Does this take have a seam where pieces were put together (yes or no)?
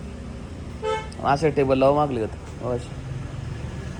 no